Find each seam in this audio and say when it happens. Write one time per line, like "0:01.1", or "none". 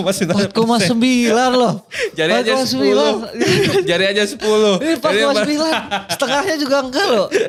none